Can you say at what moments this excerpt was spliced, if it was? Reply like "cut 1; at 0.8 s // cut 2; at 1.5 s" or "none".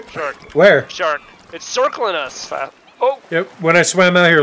cut 1; at 2.4 s